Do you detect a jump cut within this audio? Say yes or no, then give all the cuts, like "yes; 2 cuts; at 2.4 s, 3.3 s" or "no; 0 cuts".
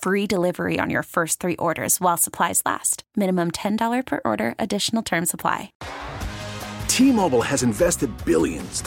yes; 1 cut; at 5.8 s